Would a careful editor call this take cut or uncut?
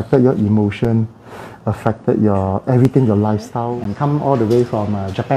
cut